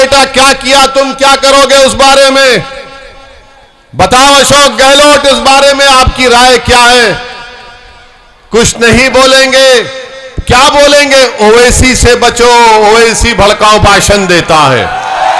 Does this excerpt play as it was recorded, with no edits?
yes; 0 cuts

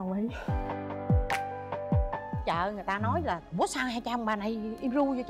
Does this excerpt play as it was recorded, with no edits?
no; 1 cut; at 2.4 s

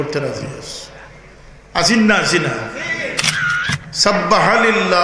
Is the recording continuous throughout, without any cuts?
no; 1 cut; at 3.3 s

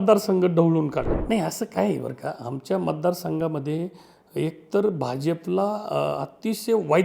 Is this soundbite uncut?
no; 1 cut; at 1.2 s

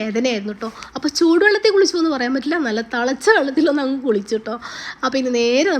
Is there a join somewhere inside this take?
no; 0 cuts

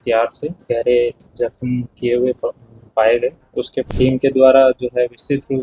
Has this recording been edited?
yes; 1 cut; at 3.8 s

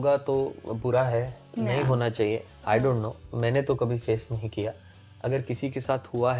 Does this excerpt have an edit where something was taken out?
no; 0 cuts

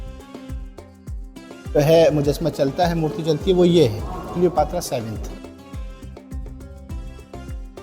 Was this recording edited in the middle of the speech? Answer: yes; 2 cuts; at 1.8 s, 5.3 s

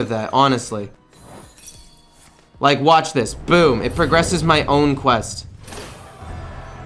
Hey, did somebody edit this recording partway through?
yes; 1 cut; at 1.0 s

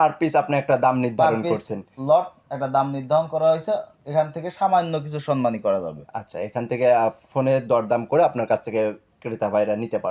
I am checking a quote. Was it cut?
no; 0 cuts

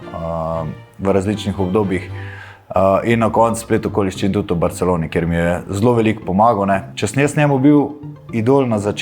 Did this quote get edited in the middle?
yes; 1 cut; at 6.9 s

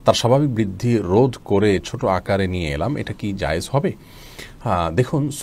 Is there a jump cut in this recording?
no; 0 cuts

